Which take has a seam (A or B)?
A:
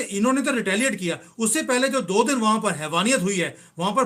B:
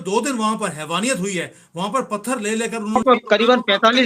B